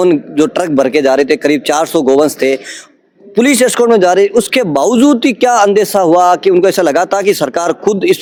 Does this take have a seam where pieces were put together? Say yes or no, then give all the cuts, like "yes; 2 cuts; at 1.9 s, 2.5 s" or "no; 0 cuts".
no; 0 cuts